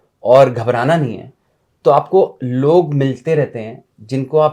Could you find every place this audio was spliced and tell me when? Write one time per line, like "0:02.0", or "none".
none

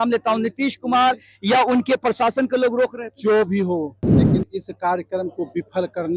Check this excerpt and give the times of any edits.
none

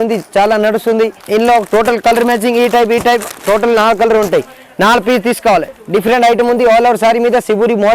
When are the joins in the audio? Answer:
0:01.2
0:05.7

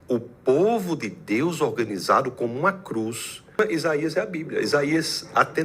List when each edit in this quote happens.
0:03.6

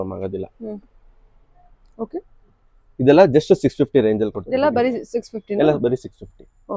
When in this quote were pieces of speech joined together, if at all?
0:04.4

